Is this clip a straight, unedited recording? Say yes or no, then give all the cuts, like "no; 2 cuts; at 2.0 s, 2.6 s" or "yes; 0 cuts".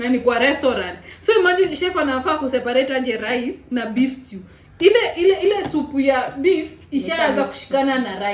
yes; 0 cuts